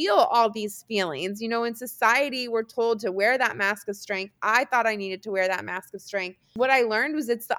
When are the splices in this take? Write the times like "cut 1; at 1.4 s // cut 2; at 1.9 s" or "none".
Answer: cut 1; at 6.5 s

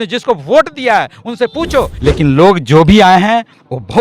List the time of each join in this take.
cut 1; at 1.9 s

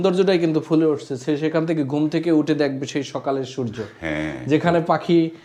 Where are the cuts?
none

